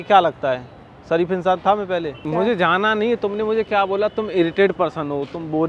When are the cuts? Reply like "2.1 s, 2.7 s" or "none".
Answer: 2.2 s